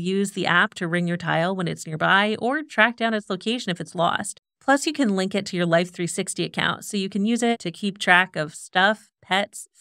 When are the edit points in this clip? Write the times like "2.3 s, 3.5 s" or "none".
4.3 s